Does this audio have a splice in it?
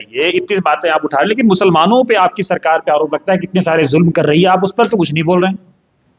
no; 0 cuts

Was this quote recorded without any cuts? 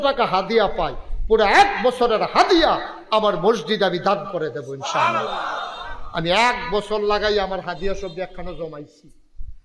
yes; 0 cuts

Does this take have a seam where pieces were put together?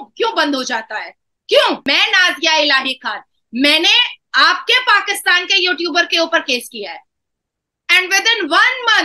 yes; 1 cut; at 1.9 s

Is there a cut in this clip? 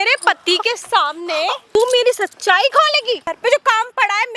yes; 2 cuts; at 1.8 s, 3.3 s

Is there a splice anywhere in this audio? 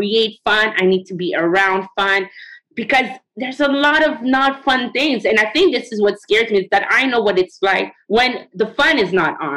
yes; 2 cuts; at 3.2 s, 8.2 s

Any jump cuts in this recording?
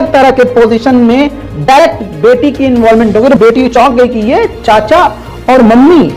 no; 0 cuts

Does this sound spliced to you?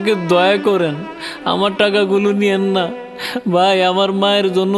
no; 0 cuts

